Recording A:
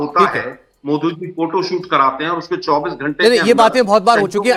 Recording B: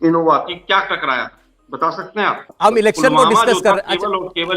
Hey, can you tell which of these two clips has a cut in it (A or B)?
B